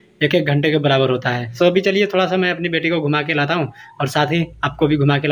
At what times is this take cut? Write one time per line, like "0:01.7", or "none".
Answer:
none